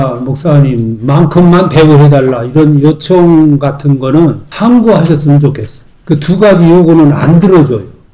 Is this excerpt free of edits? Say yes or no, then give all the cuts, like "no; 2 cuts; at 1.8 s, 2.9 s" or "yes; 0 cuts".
yes; 0 cuts